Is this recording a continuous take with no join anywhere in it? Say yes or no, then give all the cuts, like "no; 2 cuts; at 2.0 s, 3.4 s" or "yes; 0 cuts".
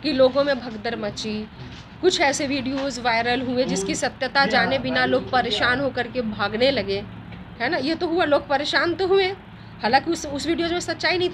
yes; 0 cuts